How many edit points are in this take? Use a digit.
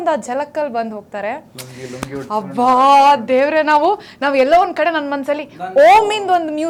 0